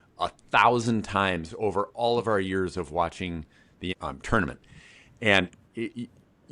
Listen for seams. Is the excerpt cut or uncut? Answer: cut